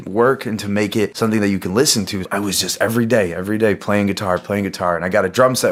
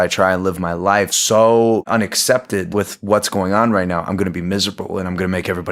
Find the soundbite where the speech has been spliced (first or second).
second